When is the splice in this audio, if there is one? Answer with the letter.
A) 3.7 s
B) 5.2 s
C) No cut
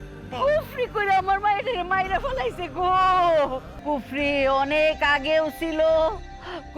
A